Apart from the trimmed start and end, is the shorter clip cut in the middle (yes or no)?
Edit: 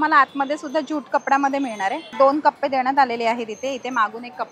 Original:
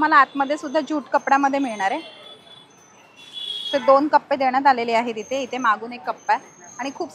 yes